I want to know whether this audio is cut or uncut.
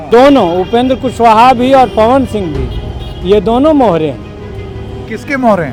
uncut